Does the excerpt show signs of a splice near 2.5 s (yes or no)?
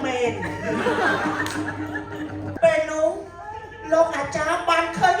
yes